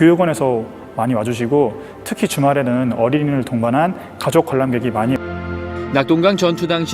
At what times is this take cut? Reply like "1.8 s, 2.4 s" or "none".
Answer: 4.7 s